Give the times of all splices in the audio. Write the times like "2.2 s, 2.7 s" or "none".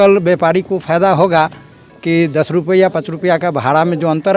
none